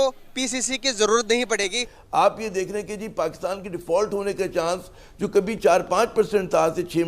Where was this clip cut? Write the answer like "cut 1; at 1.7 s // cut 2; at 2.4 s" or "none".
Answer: cut 1; at 1.9 s